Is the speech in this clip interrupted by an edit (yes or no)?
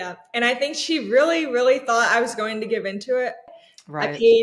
yes